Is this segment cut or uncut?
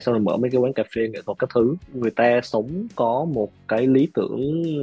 cut